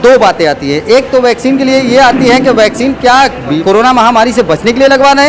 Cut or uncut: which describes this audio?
cut